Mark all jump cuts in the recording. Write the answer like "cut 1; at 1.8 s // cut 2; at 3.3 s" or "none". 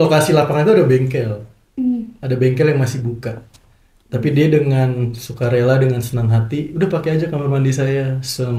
none